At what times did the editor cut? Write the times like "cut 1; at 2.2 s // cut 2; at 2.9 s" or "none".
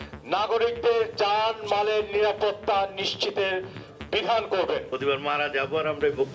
cut 1; at 4.9 s